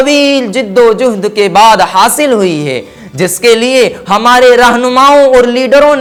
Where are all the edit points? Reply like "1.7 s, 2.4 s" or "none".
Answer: none